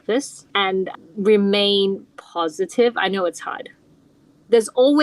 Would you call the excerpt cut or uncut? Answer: cut